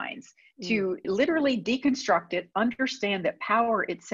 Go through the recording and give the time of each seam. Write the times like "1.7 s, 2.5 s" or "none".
1.1 s